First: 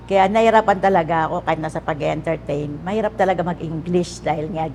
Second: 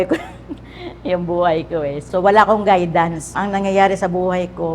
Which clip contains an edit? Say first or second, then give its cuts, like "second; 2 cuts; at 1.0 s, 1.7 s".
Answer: second; 2 cuts; at 2.0 s, 3.3 s